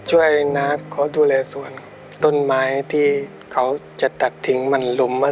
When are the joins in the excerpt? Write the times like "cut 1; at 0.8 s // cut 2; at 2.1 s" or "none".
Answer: cut 1; at 0.8 s // cut 2; at 2.0 s // cut 3; at 3.4 s